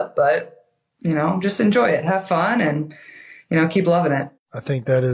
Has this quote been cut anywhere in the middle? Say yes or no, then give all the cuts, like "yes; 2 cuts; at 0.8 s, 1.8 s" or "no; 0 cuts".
no; 0 cuts